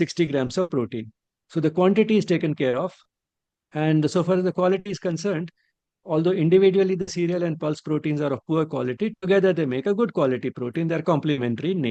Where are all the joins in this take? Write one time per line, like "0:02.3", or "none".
none